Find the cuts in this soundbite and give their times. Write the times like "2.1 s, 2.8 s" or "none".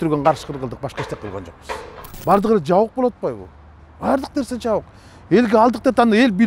2.1 s